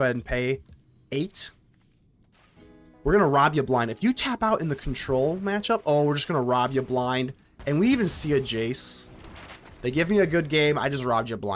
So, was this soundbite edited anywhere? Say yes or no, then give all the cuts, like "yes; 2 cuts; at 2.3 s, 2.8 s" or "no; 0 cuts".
no; 0 cuts